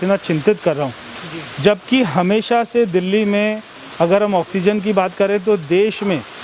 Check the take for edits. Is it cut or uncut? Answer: uncut